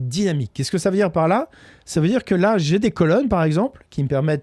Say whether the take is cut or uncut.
uncut